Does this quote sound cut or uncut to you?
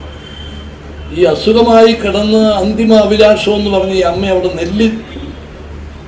uncut